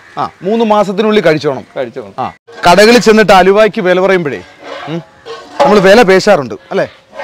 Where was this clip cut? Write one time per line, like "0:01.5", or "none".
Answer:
0:02.5